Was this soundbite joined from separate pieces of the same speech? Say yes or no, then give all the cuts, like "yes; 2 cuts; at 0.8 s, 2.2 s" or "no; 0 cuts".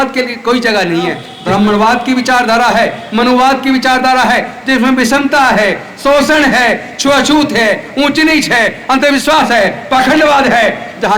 yes; 1 cut; at 1.3 s